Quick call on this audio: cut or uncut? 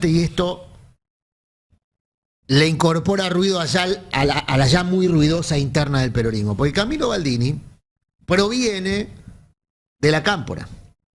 uncut